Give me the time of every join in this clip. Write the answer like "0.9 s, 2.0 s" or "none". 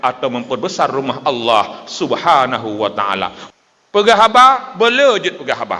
3.4 s